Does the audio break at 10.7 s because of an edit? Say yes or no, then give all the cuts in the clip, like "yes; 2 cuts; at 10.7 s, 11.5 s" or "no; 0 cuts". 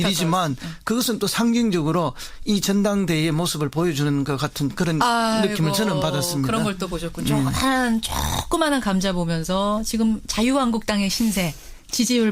no; 1 cut; at 5.3 s